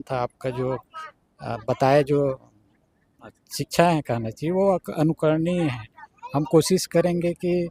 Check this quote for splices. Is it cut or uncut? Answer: uncut